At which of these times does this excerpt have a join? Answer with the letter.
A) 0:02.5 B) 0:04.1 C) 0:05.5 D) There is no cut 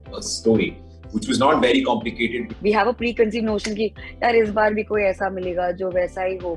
A